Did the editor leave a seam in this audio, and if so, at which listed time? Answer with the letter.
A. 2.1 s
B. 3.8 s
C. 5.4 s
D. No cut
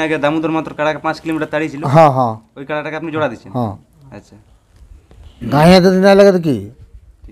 C